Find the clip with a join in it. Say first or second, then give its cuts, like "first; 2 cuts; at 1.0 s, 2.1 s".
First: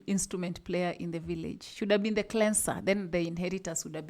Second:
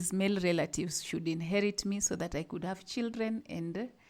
first; 1 cut; at 1.7 s